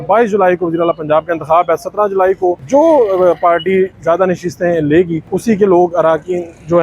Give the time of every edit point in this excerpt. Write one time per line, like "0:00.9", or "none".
0:02.6
0:05.2

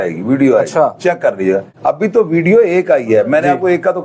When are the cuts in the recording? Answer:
0:01.7

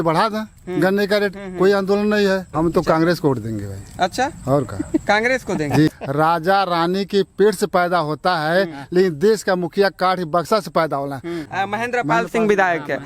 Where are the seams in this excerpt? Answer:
0:02.5
0:05.9
0:11.5

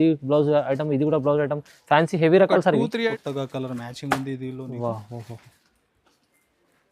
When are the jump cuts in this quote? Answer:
0:03.1

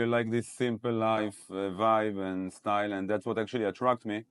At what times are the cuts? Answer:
none

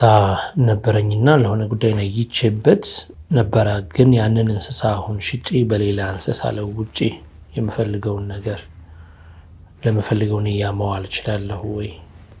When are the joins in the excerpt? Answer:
none

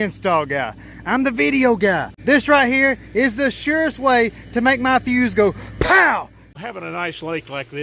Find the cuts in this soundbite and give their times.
0:02.1
0:06.4

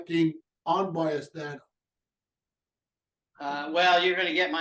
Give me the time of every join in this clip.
0:03.6

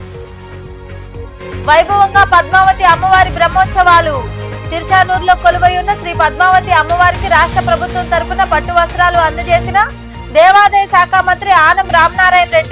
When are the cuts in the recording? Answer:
none

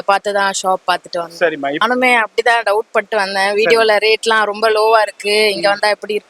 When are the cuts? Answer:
0:01.8

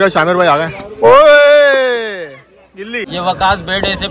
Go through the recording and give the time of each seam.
0:03.0

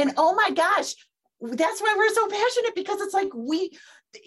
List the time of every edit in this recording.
none

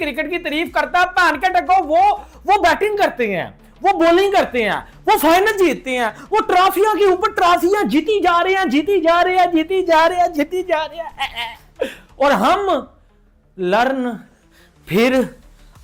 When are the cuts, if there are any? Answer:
none

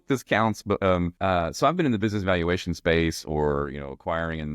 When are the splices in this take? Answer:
0:01.1

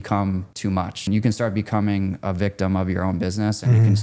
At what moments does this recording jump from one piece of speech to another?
0:01.1

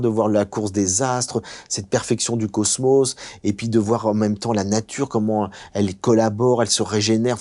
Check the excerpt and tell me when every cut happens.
none

